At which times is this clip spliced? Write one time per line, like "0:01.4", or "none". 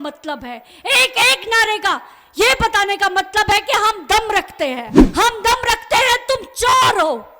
0:04.9